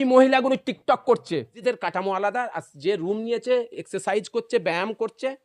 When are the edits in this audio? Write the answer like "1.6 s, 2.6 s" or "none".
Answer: 1.5 s